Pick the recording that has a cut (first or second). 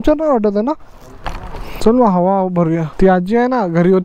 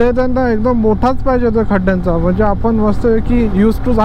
first